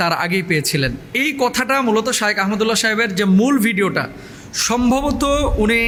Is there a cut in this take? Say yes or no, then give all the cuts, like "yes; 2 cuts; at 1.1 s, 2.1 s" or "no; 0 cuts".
no; 0 cuts